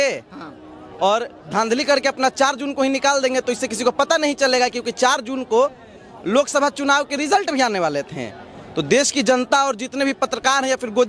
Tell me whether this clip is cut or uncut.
uncut